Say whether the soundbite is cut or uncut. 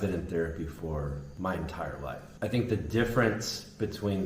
cut